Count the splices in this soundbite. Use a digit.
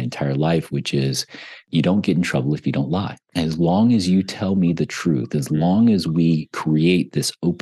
2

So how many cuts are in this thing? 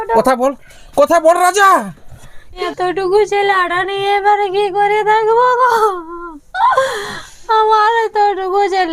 1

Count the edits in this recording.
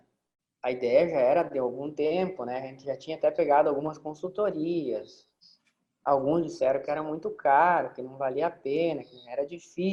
0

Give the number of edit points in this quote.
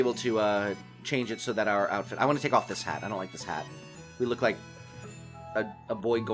0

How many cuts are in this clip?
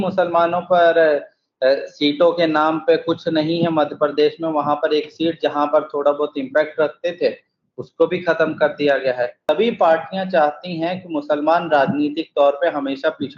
1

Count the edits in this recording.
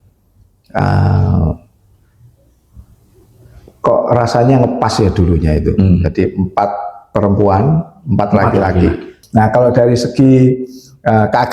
1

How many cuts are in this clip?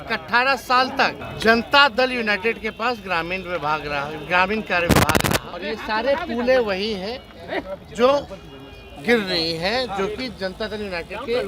2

